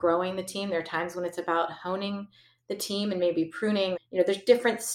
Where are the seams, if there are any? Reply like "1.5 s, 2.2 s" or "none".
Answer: 4.0 s